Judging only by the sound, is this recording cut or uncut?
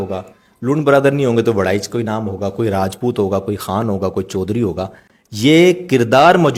uncut